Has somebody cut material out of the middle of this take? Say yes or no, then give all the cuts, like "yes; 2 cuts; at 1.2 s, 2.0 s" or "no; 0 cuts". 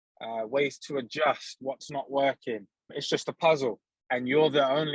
yes; 2 cuts; at 3.0 s, 3.9 s